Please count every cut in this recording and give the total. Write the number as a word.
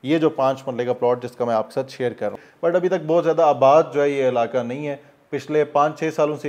one